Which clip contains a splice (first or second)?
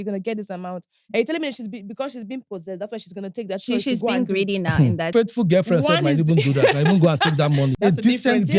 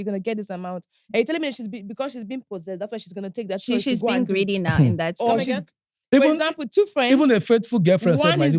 first